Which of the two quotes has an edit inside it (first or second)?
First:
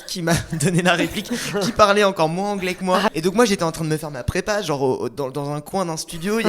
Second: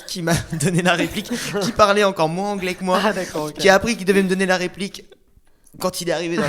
first